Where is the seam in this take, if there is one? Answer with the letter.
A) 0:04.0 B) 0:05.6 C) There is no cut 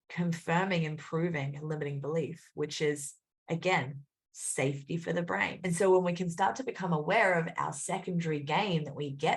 B